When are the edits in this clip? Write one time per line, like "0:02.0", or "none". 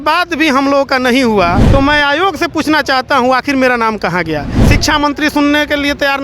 0:01.6
0:04.6